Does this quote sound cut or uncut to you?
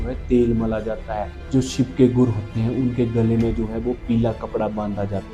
uncut